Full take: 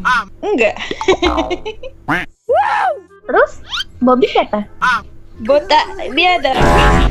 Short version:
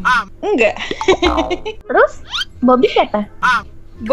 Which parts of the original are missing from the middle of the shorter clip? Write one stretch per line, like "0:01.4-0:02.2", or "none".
0:01.7-0:03.1